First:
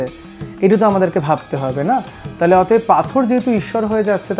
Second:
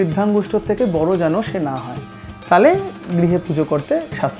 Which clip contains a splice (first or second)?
first